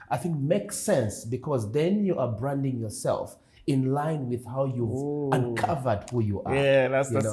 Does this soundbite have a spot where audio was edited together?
no; 0 cuts

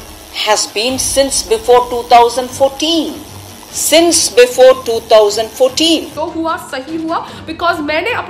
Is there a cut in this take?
yes; 1 cut; at 6.2 s

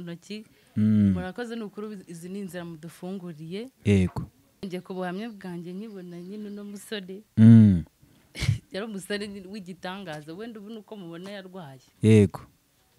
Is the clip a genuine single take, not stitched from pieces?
no; 1 cut; at 4.6 s

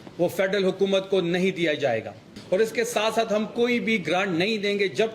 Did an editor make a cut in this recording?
yes; 1 cut; at 2.3 s

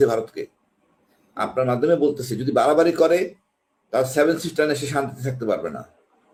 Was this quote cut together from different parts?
no; 0 cuts

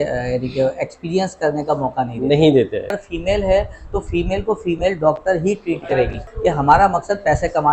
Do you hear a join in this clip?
yes; 2 cuts; at 3.0 s, 6.3 s

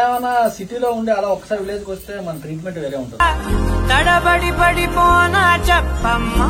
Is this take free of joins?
yes; 0 cuts

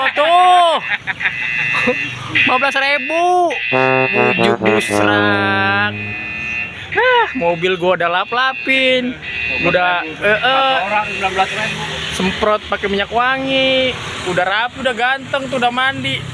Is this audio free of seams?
yes; 0 cuts

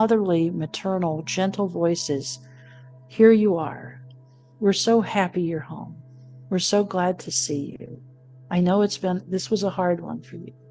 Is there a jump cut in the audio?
no; 0 cuts

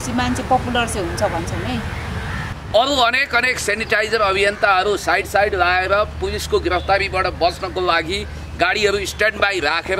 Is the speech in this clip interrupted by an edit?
yes; 1 cut; at 2.4 s

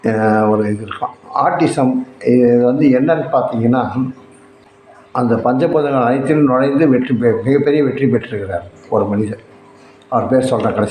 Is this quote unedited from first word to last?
no; 1 cut; at 4.7 s

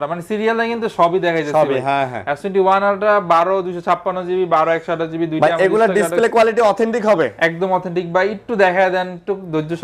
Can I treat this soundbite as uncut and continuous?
yes; 0 cuts

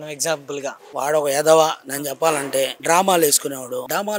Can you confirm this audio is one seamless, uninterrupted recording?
yes; 0 cuts

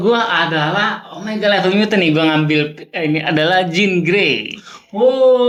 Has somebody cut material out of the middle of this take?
no; 0 cuts

